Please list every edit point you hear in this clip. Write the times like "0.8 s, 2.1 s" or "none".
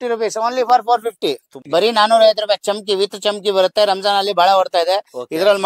1.5 s